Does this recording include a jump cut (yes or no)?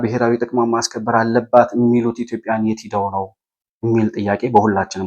no